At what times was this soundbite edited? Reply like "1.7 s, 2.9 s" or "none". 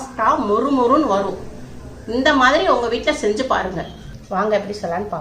4.1 s